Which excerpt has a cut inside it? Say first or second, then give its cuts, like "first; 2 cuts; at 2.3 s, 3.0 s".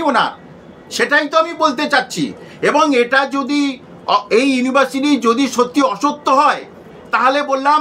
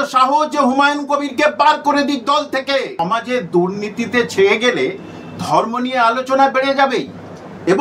second; 1 cut; at 3.0 s